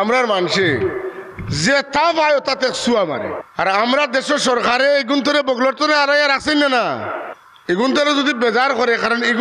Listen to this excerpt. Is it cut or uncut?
cut